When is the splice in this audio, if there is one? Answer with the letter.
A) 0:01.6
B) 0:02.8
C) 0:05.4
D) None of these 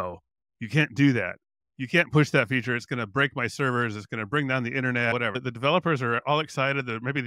C